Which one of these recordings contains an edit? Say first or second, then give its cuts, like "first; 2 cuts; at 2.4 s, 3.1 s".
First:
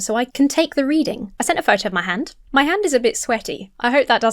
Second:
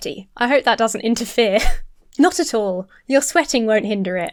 first; 2 cuts; at 1.3 s, 2.4 s